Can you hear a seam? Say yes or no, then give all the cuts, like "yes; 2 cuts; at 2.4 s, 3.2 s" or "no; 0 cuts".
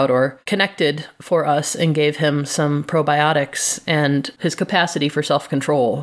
yes; 1 cut; at 4.3 s